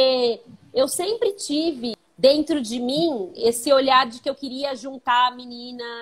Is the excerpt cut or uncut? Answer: cut